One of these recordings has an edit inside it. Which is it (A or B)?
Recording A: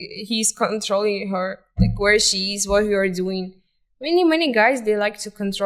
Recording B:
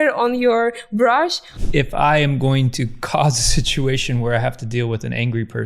B